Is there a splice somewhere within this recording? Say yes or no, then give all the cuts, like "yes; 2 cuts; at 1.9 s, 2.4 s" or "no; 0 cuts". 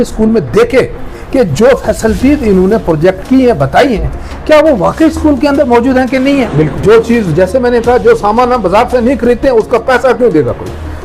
yes; 1 cut; at 6.8 s